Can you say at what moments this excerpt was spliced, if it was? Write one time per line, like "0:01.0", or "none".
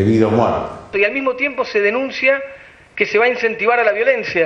0:00.9